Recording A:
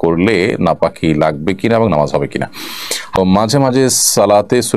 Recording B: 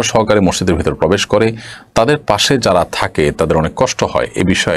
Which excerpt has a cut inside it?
A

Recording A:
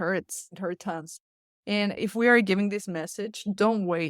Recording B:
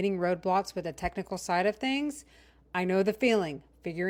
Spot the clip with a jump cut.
A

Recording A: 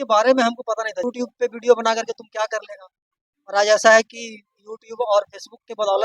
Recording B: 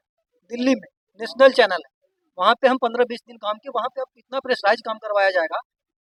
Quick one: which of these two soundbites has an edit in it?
A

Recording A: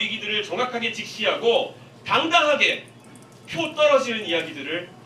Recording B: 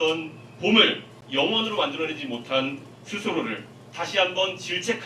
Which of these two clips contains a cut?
B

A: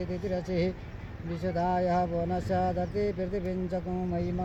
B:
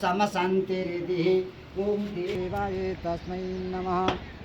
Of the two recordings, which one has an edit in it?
B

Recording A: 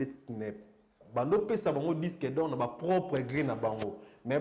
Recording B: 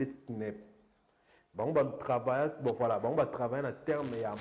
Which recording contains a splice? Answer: A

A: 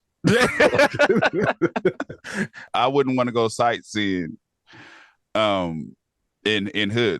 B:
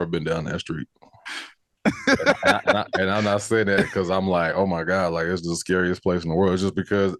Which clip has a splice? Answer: A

